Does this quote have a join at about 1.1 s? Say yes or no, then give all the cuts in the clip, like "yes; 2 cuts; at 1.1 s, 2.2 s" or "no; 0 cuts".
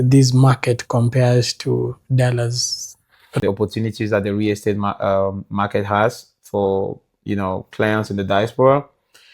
no; 1 cut; at 3.4 s